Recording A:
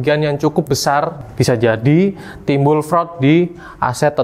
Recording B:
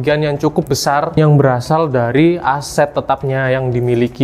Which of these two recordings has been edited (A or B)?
A